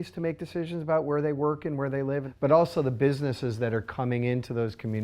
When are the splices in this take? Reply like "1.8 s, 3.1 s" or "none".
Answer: 2.3 s